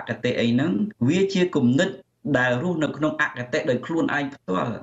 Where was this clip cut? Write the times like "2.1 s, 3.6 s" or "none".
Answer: 0.9 s